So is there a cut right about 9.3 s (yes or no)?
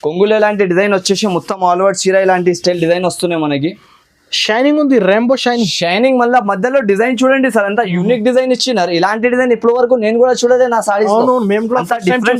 no